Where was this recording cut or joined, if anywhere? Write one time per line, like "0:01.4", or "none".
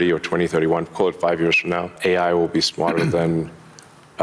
0:01.9